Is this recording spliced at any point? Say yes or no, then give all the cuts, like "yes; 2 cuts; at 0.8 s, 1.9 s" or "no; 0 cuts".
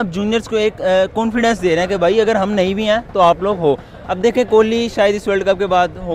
no; 0 cuts